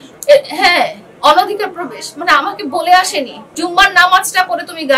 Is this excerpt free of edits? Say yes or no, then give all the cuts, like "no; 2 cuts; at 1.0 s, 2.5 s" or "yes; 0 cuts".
no; 1 cut; at 3.4 s